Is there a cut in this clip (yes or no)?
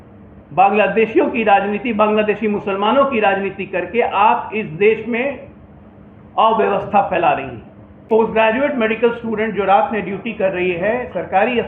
yes